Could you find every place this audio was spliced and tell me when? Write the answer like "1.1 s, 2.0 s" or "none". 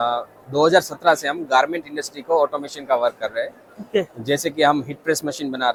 none